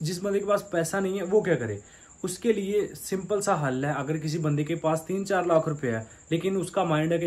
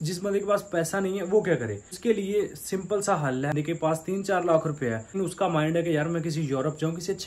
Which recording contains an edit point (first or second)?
second